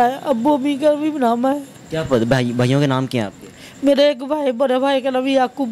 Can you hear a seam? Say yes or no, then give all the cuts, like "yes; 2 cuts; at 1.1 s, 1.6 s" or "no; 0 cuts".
no; 0 cuts